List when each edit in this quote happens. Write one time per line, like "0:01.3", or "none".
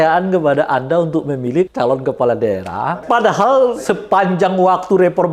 0:01.7
0:03.0
0:03.9